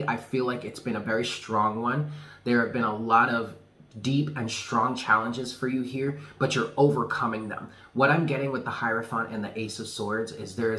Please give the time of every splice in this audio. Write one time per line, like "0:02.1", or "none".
none